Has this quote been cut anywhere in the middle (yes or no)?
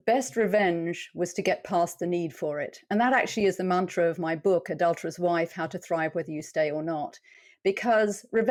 no